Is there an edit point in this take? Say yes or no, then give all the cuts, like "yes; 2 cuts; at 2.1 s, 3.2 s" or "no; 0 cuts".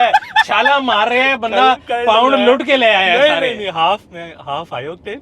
no; 0 cuts